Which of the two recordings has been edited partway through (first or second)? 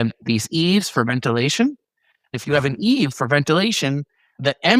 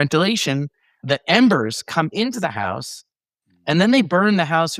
first